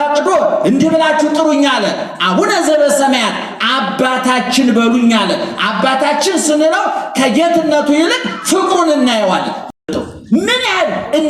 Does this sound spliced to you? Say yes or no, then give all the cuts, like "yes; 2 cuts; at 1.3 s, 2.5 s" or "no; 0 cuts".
yes; 1 cut; at 9.8 s